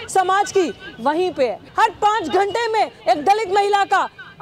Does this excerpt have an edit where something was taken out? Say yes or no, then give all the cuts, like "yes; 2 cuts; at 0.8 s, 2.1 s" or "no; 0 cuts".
yes; 1 cut; at 1.6 s